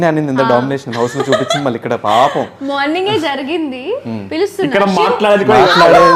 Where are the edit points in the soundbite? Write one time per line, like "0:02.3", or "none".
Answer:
none